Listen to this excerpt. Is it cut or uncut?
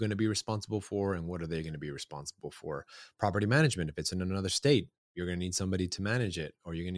uncut